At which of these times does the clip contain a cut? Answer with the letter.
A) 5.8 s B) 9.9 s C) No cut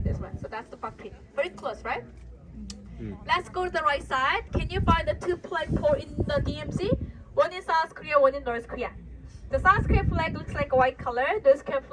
C